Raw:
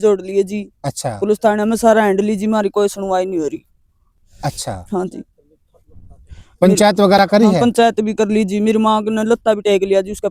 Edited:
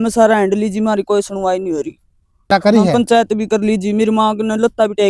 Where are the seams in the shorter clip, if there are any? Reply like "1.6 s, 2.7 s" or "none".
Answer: 2.5 s